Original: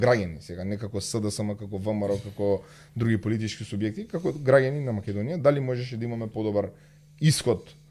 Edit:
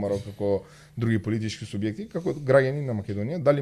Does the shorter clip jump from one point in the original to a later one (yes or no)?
no